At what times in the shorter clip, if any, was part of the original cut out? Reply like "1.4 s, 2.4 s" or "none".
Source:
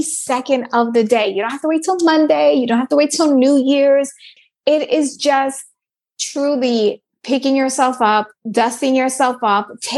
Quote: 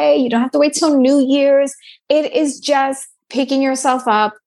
1.9 s, 3.2 s